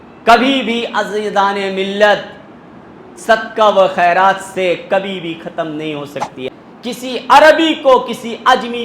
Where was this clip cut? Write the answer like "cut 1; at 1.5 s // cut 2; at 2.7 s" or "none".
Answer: cut 1; at 6.5 s